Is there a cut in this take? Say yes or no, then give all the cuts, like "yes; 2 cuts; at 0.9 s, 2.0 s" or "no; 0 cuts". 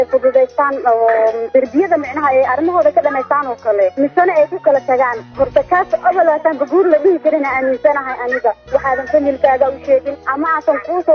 yes; 3 cuts; at 1.4 s, 3.9 s, 10.2 s